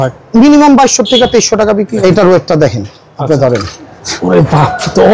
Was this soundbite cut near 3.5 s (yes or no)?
no